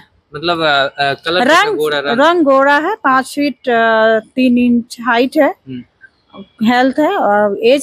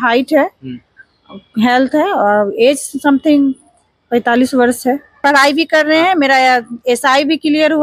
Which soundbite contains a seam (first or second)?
second